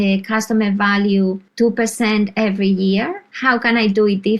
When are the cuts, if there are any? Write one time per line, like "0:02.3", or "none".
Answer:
0:01.4
0:03.2